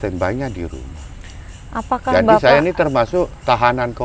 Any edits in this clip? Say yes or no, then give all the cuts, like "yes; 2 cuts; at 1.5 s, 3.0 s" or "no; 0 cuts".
no; 0 cuts